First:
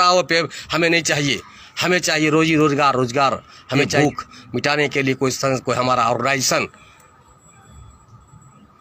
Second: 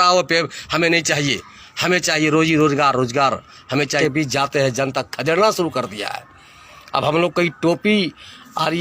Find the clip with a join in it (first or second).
second